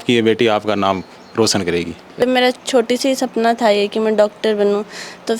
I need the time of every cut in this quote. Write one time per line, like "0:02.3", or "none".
0:02.2